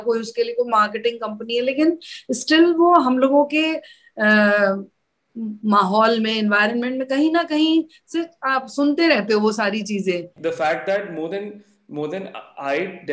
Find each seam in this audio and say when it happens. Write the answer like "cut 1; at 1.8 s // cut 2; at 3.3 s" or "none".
cut 1; at 10.3 s